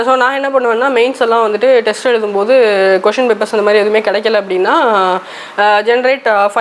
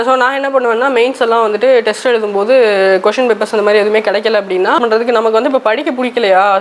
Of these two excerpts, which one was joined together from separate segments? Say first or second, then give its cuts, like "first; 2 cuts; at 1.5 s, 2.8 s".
second; 1 cut; at 4.8 s